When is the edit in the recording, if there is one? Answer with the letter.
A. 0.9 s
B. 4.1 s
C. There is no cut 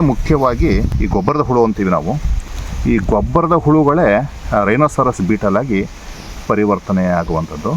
A